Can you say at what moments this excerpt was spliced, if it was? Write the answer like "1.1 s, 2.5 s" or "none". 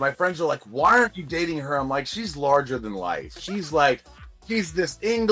none